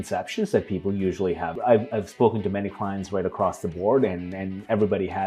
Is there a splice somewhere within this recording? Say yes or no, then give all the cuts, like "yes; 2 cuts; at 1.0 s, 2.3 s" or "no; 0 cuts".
yes; 1 cut; at 1.5 s